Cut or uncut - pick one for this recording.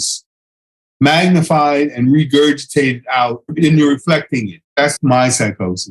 uncut